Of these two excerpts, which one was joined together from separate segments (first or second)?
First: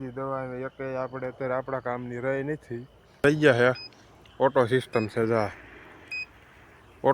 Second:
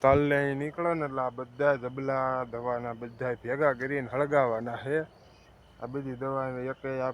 first